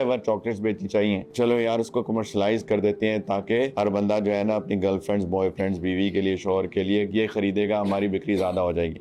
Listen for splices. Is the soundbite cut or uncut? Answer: uncut